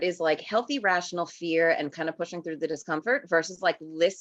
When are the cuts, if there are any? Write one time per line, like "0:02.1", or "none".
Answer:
none